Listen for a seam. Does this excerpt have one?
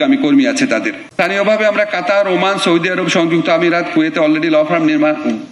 yes; 1 cut; at 1.0 s

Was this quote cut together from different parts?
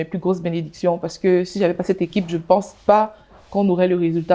no; 0 cuts

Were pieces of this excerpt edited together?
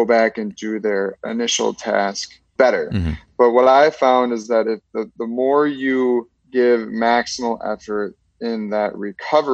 yes; 1 cut; at 2.5 s

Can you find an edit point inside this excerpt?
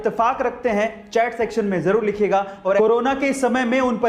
yes; 1 cut; at 2.8 s

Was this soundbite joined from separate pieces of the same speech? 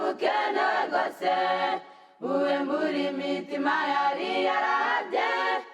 yes; 1 cut; at 1.7 s

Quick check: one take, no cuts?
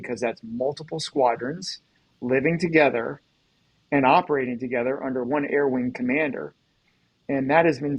no; 1 cut; at 5.3 s

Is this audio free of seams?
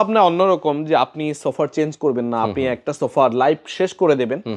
yes; 0 cuts

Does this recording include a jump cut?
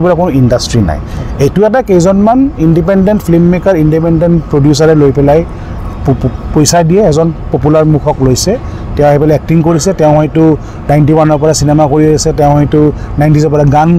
no; 0 cuts

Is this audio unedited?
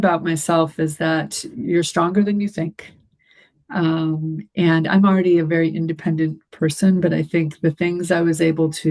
yes; 0 cuts

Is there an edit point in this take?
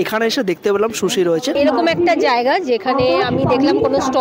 yes; 1 cut; at 1.6 s

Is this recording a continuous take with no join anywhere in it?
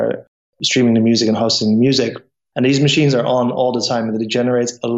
yes; 0 cuts

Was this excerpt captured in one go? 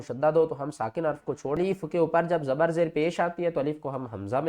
no; 1 cut; at 1.6 s

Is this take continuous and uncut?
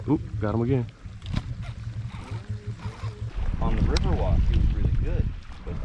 no; 1 cut; at 3.3 s

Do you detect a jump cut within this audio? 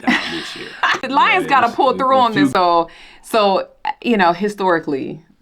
yes; 2 cuts; at 1.1 s, 2.5 s

